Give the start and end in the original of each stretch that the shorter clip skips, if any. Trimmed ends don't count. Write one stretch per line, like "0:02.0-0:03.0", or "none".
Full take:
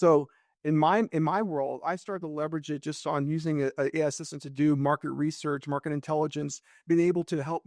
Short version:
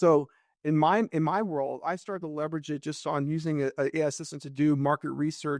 none